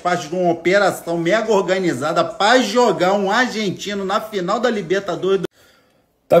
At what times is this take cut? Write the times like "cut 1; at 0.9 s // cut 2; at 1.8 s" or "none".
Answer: cut 1; at 5.4 s